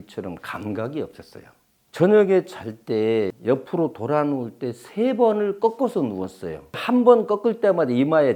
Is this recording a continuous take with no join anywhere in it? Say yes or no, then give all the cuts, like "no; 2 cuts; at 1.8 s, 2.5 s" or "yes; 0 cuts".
no; 2 cuts; at 3.4 s, 6.8 s